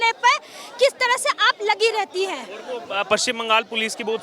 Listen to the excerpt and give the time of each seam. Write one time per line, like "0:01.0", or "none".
none

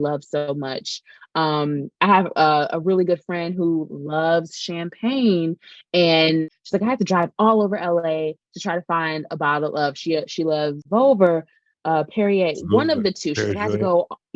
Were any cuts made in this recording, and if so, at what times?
0:06.6
0:10.8

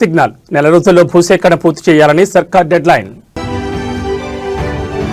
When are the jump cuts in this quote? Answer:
none

